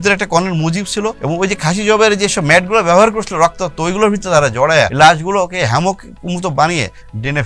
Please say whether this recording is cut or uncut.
cut